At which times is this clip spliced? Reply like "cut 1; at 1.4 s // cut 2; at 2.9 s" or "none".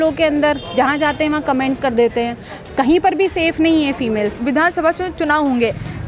cut 1; at 4.3 s